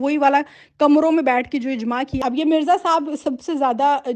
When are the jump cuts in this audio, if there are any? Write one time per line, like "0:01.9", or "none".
0:02.2